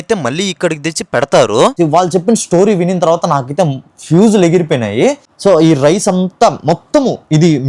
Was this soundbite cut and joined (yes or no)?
yes